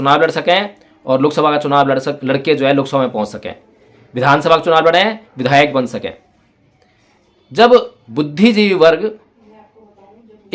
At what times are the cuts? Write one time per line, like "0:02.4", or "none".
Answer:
0:08.0